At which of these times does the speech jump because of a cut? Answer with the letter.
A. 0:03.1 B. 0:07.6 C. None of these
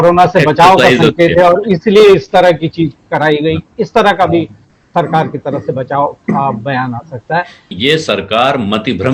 B